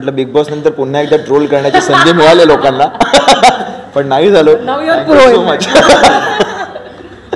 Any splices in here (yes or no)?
no